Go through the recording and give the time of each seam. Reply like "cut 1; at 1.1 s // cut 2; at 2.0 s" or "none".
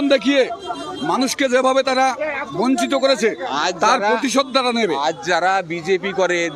none

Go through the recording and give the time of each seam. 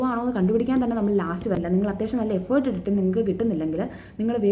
cut 1; at 1.6 s

